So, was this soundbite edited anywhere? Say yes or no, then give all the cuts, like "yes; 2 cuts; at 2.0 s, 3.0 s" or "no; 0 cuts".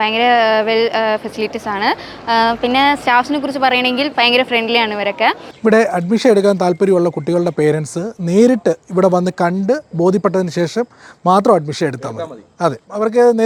no; 0 cuts